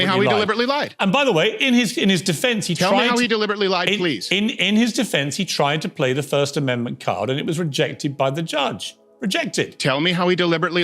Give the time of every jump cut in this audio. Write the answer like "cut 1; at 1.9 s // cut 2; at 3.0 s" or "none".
cut 1; at 1.4 s